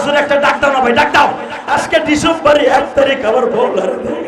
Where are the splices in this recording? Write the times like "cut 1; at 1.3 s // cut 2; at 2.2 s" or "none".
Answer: cut 1; at 1.5 s